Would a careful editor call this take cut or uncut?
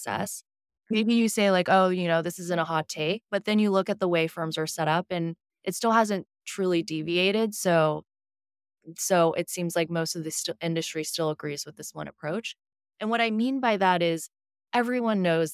uncut